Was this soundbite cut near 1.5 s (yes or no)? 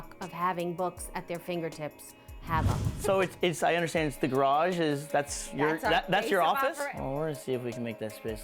no